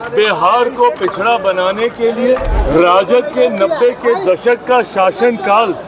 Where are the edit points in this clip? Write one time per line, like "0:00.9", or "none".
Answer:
0:02.5